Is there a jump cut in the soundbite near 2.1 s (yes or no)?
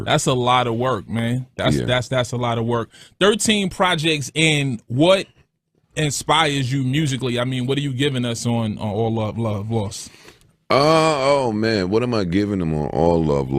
yes